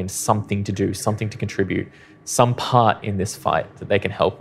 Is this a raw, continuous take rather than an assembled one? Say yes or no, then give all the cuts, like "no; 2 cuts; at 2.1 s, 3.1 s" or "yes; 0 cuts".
yes; 0 cuts